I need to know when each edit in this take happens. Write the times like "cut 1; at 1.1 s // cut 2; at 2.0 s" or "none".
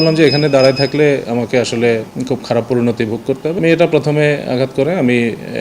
cut 1; at 2.1 s // cut 2; at 3.6 s